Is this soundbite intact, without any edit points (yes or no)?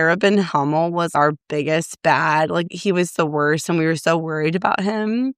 no